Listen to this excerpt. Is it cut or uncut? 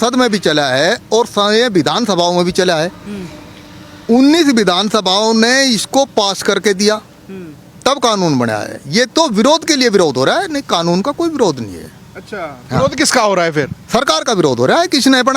uncut